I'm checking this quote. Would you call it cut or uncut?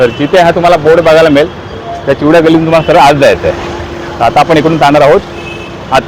uncut